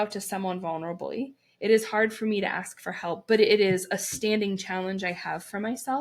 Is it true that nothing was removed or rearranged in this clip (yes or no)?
yes